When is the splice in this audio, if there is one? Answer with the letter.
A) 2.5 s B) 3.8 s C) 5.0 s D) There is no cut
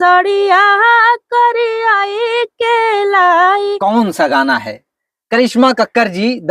B